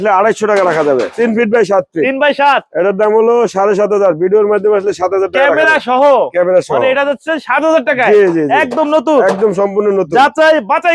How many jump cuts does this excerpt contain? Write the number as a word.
one